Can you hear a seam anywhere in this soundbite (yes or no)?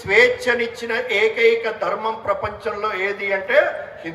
no